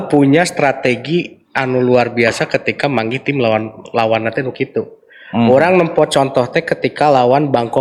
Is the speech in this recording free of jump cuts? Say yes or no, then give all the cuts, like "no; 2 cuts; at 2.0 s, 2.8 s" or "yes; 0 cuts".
yes; 0 cuts